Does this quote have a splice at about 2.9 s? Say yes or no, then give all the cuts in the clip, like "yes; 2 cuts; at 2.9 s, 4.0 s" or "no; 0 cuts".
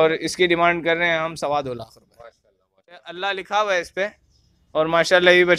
yes; 1 cut; at 2.9 s